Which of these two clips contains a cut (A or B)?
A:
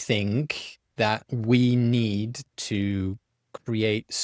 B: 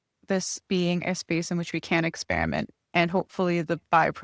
A